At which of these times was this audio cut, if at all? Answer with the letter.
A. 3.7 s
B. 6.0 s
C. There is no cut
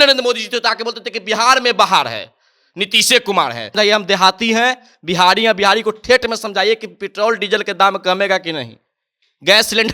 A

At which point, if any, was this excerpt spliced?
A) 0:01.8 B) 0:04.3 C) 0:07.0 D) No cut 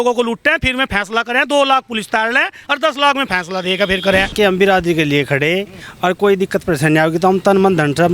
B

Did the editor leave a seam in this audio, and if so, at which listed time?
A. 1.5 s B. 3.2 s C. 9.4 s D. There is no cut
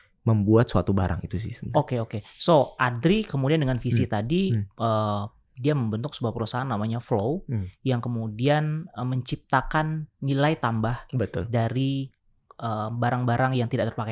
D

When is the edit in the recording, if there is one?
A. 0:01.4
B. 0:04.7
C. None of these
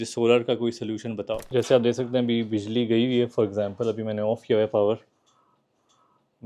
A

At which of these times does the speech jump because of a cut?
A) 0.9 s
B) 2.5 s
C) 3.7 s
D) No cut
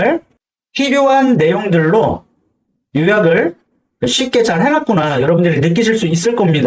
D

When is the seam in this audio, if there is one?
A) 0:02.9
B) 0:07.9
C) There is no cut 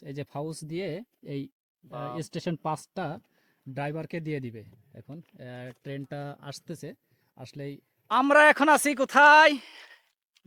B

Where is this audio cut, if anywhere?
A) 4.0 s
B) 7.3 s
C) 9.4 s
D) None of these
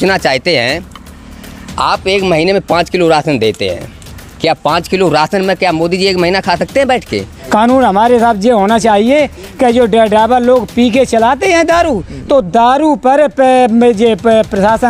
B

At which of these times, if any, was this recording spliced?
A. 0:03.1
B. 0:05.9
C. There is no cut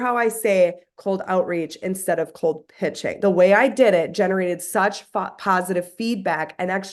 A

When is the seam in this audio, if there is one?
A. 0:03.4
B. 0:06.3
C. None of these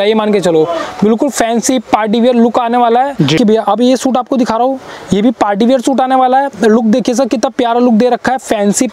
A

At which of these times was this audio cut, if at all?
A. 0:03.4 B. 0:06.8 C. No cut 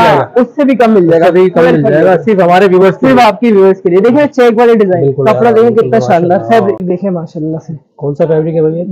B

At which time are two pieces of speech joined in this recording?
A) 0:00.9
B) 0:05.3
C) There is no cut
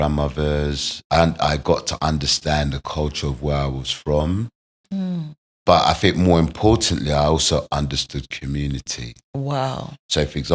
A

